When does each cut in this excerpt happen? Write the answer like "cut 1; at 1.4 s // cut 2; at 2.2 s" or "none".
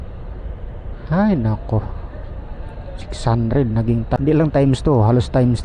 cut 1; at 4.2 s